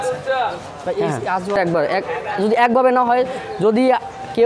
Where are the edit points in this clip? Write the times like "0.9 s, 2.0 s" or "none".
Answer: 1.6 s